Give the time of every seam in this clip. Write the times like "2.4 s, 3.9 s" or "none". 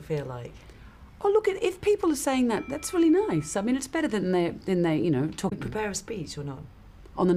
none